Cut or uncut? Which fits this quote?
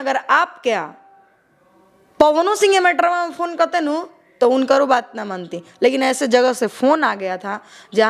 uncut